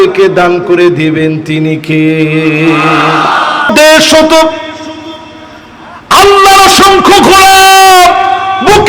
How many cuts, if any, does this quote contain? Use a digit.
1